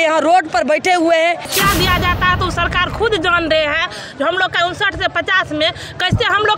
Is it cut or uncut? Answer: cut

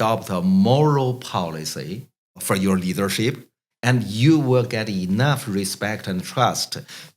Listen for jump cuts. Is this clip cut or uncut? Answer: cut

